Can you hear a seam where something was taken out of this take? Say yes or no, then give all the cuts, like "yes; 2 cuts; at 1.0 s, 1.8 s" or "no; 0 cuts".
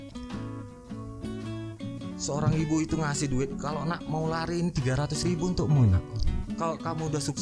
no; 0 cuts